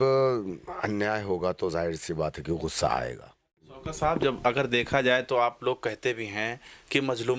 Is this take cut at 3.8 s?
yes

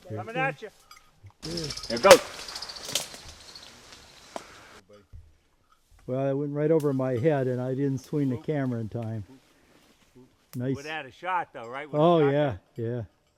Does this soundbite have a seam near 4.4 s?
yes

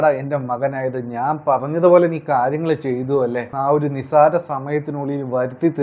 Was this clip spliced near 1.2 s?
no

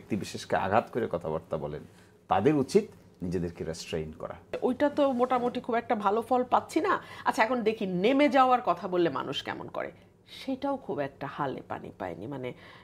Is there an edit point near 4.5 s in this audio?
yes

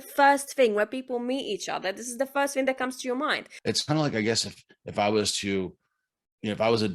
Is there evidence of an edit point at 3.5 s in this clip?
yes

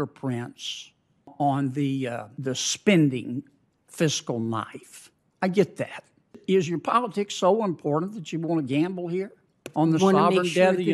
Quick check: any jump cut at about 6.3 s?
yes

